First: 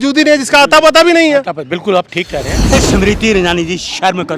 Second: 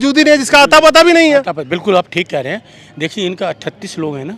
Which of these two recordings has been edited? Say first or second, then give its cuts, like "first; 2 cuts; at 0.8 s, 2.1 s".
first; 1 cut; at 2.8 s